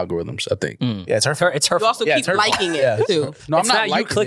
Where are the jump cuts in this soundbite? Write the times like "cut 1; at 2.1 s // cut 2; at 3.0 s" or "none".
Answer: none